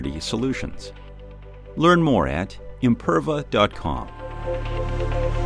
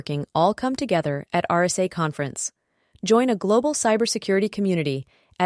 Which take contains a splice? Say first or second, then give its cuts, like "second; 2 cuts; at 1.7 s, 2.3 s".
first; 1 cut; at 4.3 s